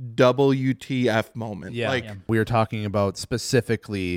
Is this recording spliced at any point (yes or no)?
yes